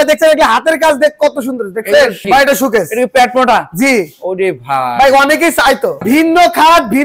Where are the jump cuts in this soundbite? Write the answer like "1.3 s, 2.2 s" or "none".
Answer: 2.2 s, 6.0 s

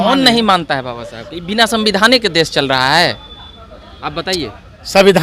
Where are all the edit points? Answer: none

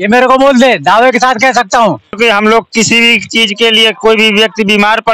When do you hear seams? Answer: 2.1 s

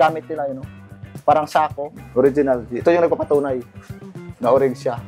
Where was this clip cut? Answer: 2.0 s

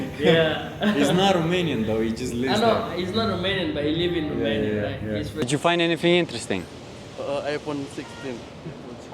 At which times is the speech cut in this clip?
5.4 s

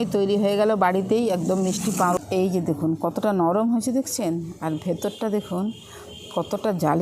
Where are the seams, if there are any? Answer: 2.2 s

